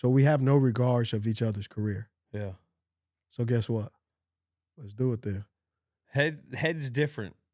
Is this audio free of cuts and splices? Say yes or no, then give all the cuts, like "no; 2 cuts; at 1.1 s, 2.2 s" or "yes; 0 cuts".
yes; 0 cuts